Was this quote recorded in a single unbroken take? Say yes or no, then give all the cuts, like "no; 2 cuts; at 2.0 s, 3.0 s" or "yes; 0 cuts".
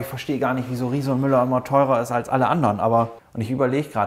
no; 1 cut; at 3.1 s